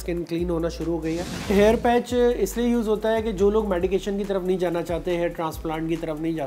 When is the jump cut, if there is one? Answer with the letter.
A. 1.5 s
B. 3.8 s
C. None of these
A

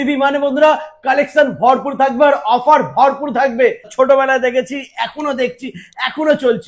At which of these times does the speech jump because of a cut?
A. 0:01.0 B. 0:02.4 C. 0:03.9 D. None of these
C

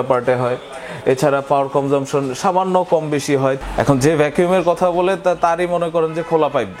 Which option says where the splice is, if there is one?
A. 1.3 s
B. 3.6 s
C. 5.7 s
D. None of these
B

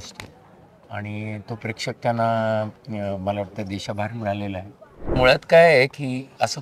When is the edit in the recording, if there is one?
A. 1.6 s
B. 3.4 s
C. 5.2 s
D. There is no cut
C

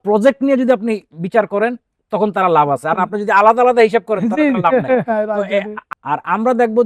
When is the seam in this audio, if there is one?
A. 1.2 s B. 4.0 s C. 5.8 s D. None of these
C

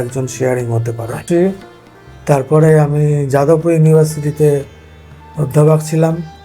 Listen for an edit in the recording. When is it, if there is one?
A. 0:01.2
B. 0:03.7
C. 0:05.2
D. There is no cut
A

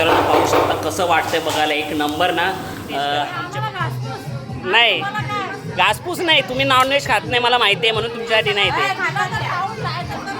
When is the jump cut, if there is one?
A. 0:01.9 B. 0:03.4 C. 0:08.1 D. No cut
B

